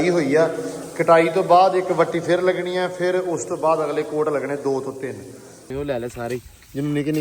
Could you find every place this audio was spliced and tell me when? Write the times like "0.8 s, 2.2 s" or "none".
5.7 s